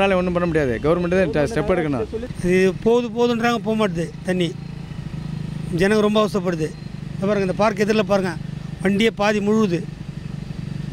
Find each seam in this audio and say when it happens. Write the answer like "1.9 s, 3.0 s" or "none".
2.2 s